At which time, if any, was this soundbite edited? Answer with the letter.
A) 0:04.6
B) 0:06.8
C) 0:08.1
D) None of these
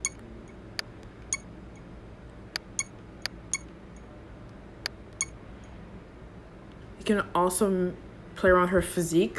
B